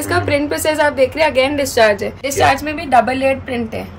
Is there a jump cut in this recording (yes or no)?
yes